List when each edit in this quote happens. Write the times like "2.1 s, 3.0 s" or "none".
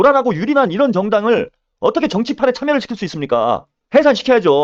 3.7 s